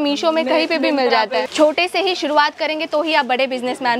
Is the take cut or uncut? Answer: cut